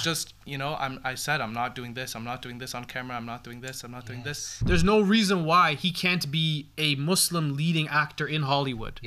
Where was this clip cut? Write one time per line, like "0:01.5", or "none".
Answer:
0:04.5

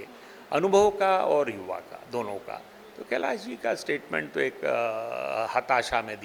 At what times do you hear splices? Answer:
none

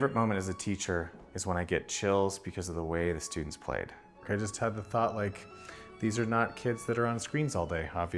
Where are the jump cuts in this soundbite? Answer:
0:04.2

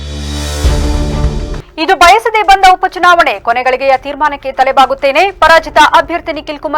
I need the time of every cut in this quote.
0:01.6

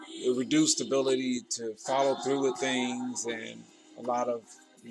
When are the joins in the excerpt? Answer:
0:02.6

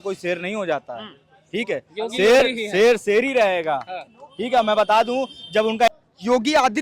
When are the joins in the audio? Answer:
0:05.9

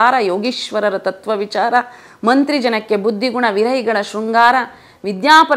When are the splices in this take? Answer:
none

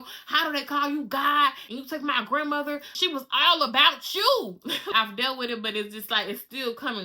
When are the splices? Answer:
0:01.7
0:02.9
0:04.9

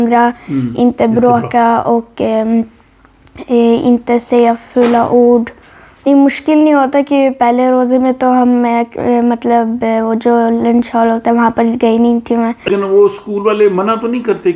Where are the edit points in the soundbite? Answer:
0:06.1
0:12.7

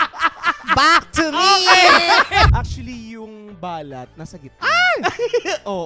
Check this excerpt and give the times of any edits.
0:02.5
0:04.4

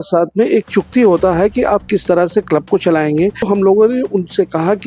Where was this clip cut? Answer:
0:03.5

